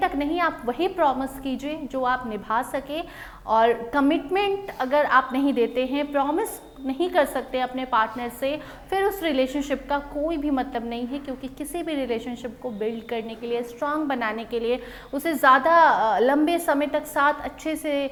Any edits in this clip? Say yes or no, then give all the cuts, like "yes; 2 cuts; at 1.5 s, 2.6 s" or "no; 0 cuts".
no; 0 cuts